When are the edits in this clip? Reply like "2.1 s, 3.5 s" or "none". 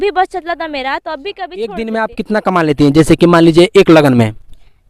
1.6 s